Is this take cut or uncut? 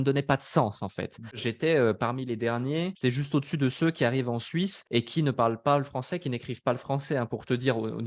cut